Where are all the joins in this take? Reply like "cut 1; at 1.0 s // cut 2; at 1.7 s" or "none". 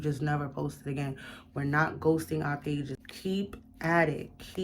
cut 1; at 3.0 s